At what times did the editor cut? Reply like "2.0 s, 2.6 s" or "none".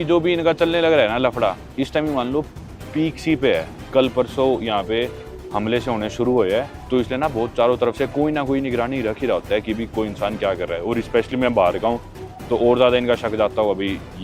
6.8 s

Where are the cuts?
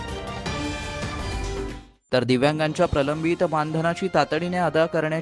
1.8 s

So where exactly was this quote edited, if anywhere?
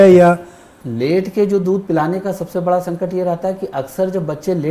none

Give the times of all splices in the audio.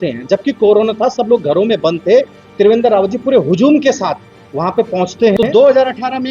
5.4 s

